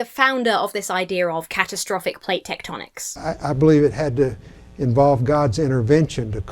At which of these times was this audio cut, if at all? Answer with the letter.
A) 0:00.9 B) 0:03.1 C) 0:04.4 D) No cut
B